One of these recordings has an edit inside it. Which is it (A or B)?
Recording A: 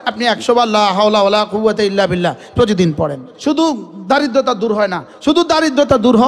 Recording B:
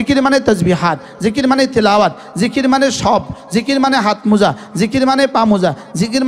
A